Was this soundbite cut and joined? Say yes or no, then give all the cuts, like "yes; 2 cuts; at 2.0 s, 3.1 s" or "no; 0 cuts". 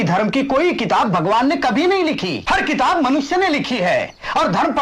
yes; 1 cut; at 2.3 s